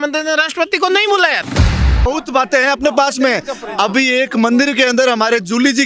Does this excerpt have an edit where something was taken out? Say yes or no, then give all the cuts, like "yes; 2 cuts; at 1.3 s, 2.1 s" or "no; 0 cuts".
yes; 1 cut; at 2.0 s